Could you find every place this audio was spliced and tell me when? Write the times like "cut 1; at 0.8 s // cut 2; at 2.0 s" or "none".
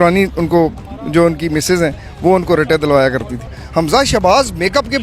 cut 1; at 3.5 s